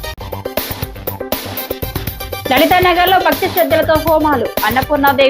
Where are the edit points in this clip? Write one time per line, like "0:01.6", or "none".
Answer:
none